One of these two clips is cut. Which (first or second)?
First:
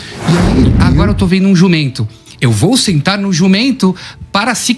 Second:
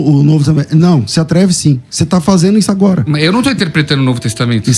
first